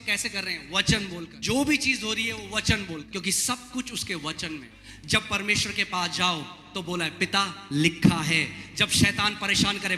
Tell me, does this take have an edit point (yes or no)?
yes